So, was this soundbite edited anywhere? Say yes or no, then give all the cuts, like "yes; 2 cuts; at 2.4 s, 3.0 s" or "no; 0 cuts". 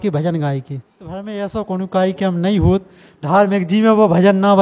yes; 1 cut; at 1.3 s